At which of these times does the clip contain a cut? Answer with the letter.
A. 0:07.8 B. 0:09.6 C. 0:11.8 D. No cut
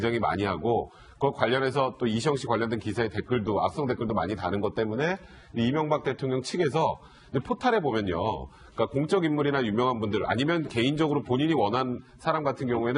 C